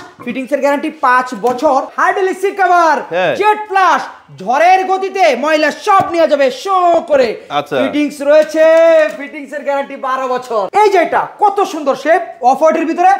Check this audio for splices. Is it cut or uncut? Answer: cut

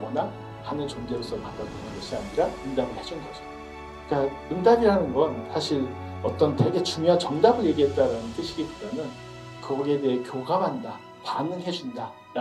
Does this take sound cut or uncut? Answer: uncut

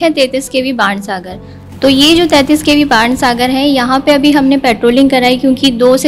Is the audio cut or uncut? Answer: uncut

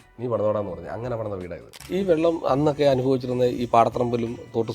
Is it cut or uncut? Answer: cut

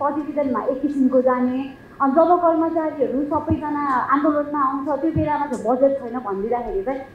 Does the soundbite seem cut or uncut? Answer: uncut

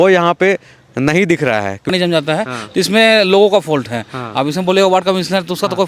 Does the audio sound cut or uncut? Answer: cut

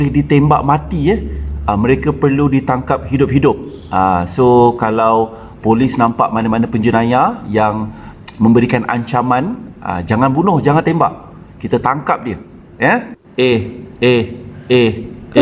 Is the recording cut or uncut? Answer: uncut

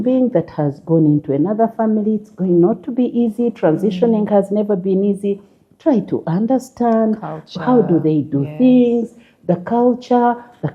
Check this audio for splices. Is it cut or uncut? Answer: uncut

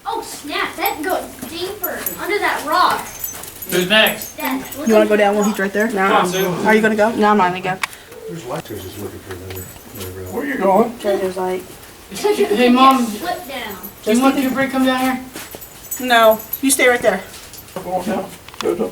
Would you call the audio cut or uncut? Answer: cut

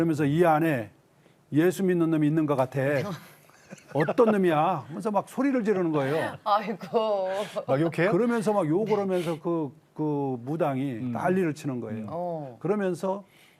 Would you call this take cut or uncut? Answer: uncut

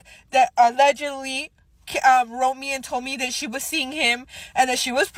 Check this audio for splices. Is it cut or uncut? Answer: uncut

